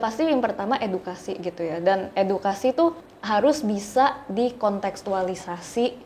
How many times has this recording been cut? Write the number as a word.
one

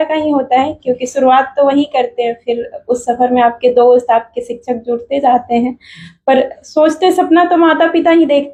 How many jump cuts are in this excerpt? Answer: zero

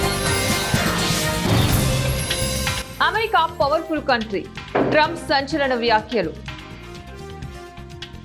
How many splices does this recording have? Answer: one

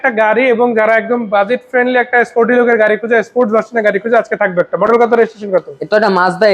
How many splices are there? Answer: zero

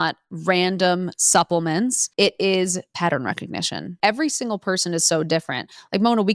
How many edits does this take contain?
two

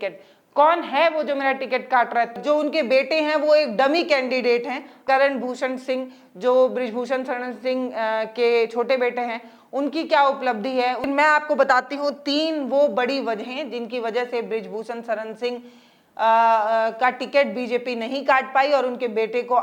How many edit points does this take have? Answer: three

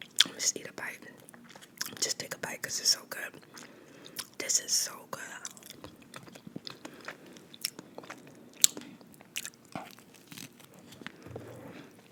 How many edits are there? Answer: zero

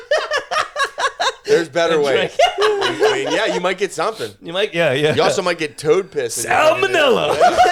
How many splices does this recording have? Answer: zero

